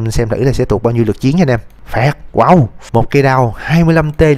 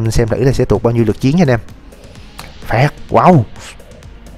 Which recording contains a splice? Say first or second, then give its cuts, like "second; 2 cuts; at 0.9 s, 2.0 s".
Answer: first; 2 cuts; at 1.8 s, 2.8 s